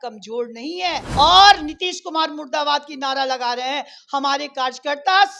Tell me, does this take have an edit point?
yes; 1 cut; at 1.1 s

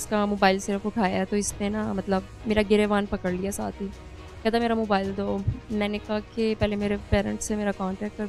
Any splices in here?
no; 0 cuts

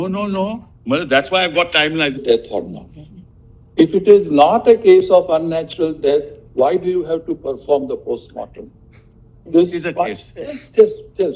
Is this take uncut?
no; 1 cut; at 2.2 s

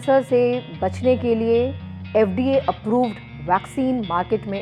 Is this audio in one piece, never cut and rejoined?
yes; 0 cuts

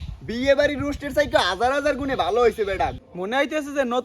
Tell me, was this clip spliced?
yes; 1 cut; at 3.0 s

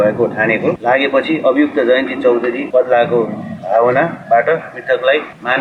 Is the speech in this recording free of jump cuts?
yes; 0 cuts

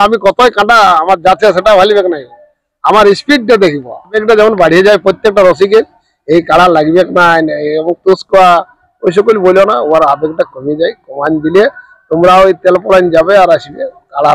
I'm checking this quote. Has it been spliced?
yes; 1 cut; at 4.2 s

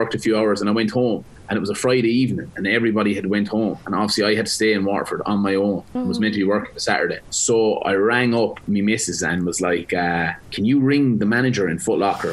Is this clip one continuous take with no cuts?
no; 4 cuts; at 3.8 s, 5.9 s, 7.3 s, 10.4 s

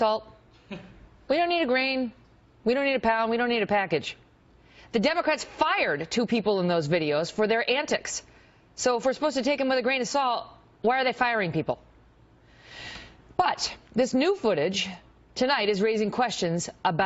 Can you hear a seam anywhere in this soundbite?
no; 0 cuts

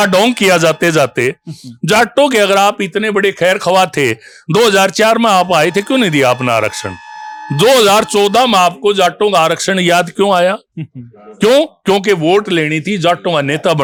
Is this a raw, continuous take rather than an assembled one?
yes; 0 cuts

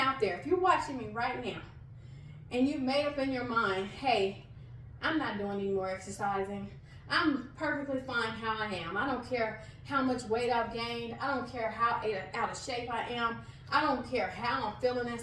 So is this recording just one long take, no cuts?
yes; 0 cuts

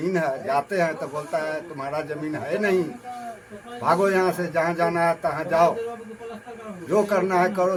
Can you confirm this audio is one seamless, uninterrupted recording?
yes; 0 cuts

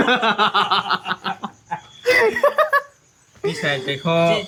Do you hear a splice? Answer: no; 0 cuts

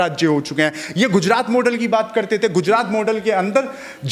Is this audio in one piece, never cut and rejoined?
yes; 0 cuts

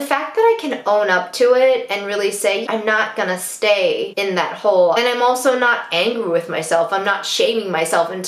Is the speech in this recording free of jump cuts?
no; 2 cuts; at 2.6 s, 5.0 s

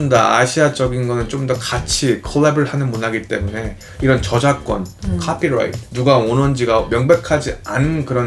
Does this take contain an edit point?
no; 0 cuts

